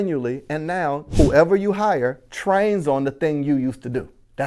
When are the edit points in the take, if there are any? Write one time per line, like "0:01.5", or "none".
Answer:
0:01.0